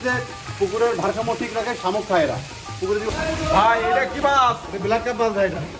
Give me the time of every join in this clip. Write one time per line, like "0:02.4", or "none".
0:03.1